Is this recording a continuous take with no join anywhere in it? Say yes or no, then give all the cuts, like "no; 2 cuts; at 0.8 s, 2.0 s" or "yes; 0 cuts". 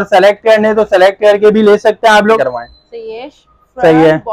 no; 1 cut; at 2.4 s